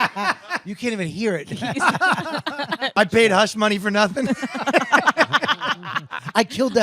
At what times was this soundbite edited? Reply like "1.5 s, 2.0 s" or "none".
3.0 s